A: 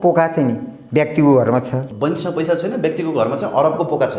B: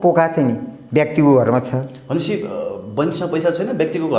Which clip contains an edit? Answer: A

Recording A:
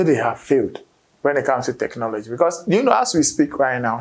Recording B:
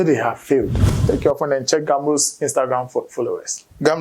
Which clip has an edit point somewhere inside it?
B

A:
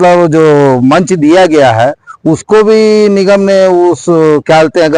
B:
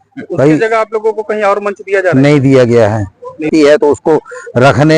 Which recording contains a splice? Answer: B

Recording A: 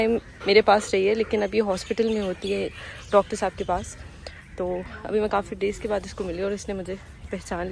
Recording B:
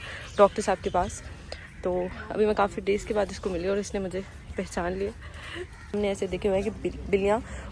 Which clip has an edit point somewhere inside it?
B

